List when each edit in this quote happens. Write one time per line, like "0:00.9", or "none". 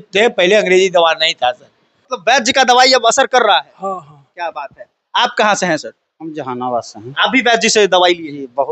0:02.0